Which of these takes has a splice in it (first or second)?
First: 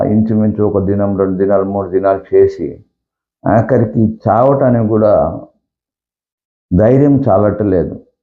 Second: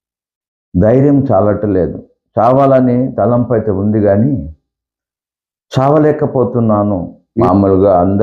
second